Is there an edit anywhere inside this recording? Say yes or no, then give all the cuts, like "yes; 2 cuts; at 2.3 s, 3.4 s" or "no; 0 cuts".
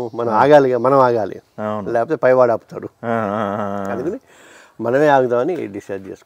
no; 0 cuts